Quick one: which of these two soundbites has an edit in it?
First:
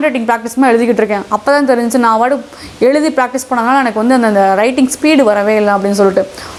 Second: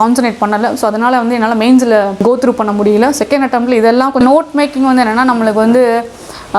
second; 2 cuts; at 2.2 s, 4.2 s

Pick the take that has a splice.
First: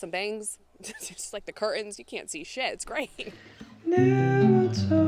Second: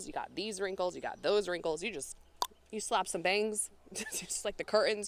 first; 1 cut; at 3.3 s

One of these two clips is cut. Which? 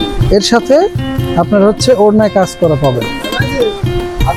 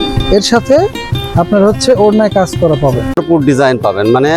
second; 1 cut; at 3.2 s

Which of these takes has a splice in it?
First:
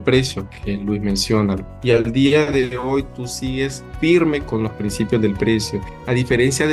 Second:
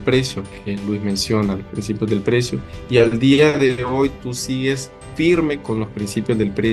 first; 2 cuts; at 1.7 s, 3.8 s

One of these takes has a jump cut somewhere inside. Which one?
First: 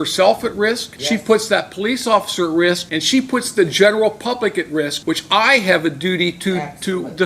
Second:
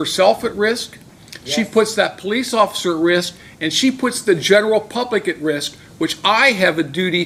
first; 3 cuts; at 0.9 s, 2.9 s, 5.0 s

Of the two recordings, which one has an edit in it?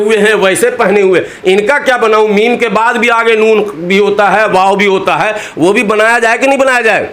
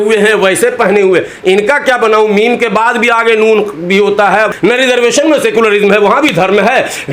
second; 1 cut; at 4.5 s

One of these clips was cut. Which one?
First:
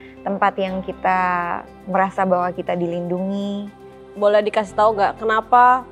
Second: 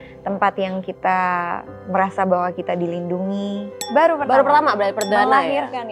second; 1 cut; at 3.7 s

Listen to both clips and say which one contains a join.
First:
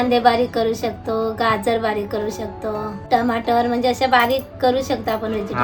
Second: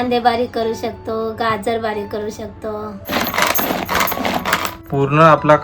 second; 2 cuts; at 3.0 s, 4.8 s

